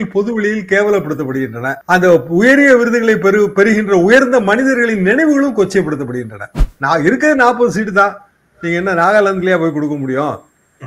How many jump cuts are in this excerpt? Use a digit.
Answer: 1